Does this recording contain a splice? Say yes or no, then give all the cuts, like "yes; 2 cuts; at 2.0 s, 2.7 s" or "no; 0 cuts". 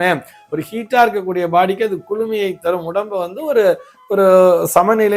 no; 0 cuts